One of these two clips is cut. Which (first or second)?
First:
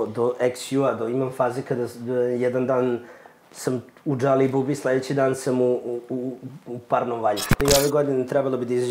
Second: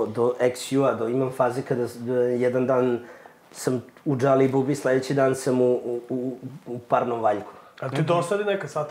first